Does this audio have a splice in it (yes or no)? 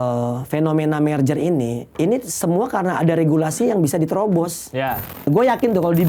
yes